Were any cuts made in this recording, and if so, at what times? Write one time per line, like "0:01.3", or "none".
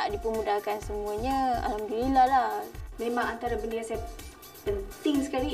0:02.8